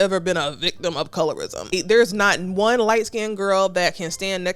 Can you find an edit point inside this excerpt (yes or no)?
yes